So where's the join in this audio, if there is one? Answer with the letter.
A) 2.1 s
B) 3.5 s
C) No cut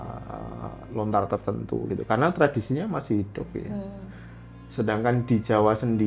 C